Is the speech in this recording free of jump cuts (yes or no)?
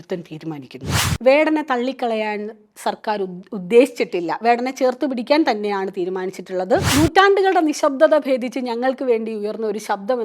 no